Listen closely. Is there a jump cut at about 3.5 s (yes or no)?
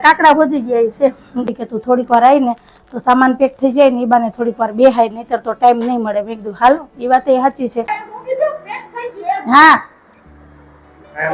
no